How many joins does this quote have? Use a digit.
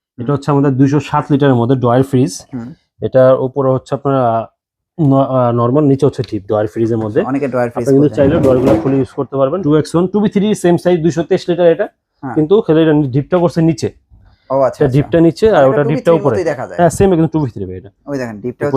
1